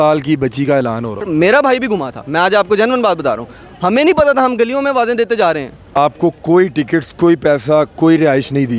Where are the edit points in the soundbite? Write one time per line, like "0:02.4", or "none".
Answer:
0:01.0
0:06.0